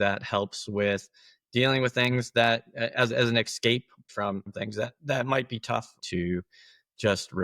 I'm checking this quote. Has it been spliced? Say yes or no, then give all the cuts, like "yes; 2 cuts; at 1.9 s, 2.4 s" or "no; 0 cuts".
yes; 2 cuts; at 4.1 s, 6.0 s